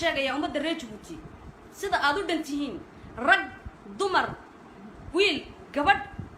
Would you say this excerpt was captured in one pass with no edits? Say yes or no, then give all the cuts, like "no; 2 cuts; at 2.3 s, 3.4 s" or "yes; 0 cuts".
yes; 0 cuts